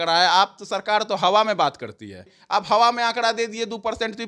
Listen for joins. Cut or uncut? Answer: cut